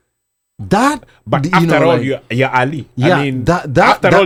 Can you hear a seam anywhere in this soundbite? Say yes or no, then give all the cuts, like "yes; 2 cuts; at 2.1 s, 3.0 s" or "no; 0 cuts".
no; 0 cuts